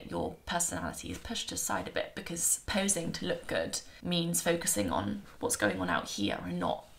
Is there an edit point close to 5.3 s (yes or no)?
yes